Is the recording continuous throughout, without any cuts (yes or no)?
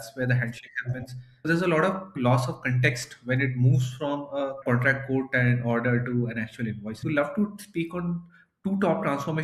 no